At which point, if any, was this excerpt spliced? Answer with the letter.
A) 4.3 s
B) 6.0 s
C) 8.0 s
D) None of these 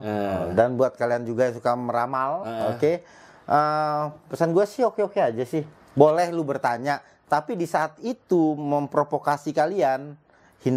D